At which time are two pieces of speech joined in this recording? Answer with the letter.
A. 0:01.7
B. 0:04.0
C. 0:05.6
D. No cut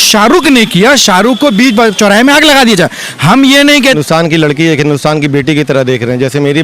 B